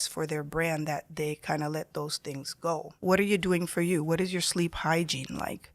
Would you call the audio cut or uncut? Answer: cut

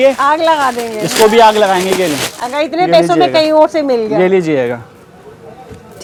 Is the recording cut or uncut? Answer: uncut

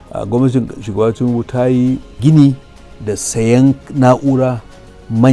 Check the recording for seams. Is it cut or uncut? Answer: uncut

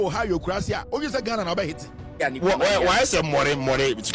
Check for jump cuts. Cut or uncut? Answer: cut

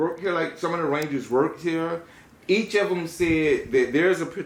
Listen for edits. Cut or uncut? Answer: uncut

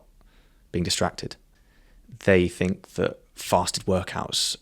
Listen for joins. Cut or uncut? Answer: cut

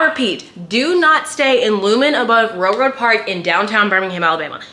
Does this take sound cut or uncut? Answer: uncut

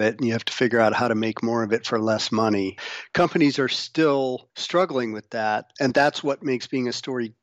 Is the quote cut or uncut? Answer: cut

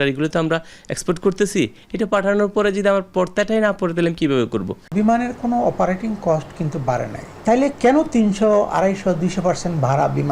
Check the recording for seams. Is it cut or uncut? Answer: cut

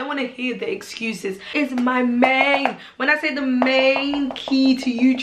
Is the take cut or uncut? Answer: cut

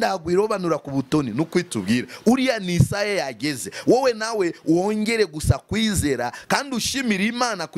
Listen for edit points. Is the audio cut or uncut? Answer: uncut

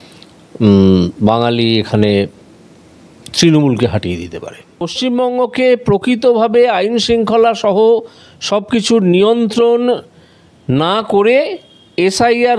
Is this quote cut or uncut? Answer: cut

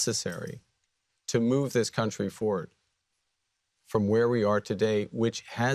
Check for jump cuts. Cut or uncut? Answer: uncut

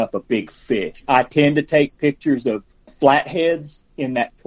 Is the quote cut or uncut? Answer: cut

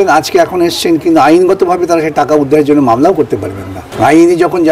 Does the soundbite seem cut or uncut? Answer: cut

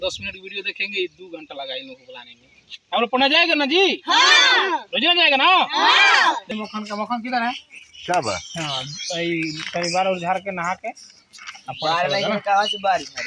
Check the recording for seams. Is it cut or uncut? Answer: cut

